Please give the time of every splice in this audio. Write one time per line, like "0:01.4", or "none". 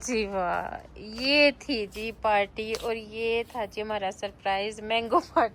none